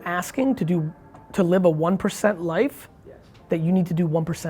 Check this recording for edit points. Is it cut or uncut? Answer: uncut